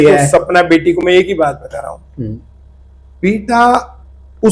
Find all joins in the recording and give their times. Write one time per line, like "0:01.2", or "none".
none